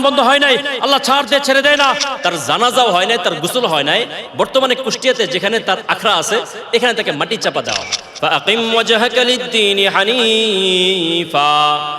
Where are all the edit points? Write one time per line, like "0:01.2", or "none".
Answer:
0:02.1
0:08.0